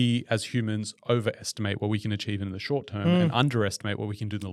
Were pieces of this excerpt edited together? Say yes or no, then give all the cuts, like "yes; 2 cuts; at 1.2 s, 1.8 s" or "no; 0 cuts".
no; 0 cuts